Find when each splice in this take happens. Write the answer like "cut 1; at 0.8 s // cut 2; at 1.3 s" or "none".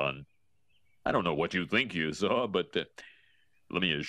none